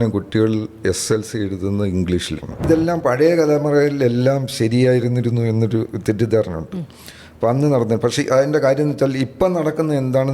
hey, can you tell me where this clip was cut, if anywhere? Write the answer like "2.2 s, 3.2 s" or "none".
2.7 s